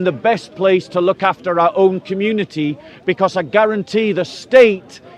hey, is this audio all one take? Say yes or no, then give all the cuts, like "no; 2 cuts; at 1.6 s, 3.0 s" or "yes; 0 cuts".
yes; 0 cuts